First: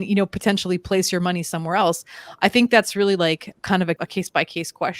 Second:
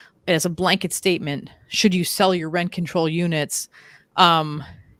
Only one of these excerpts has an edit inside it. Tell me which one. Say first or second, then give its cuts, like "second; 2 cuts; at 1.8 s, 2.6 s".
first; 1 cut; at 4.0 s